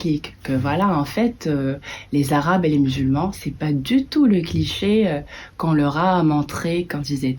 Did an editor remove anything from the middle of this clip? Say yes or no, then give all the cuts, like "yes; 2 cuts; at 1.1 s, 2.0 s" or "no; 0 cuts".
no; 0 cuts